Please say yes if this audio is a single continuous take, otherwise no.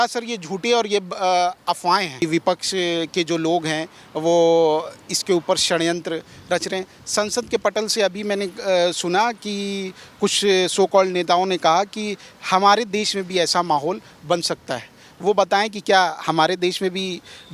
no